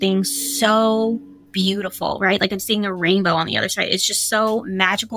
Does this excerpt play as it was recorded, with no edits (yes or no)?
yes